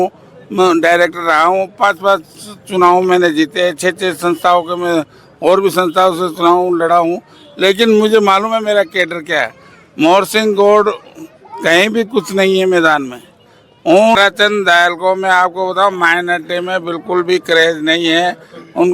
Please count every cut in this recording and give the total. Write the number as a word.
one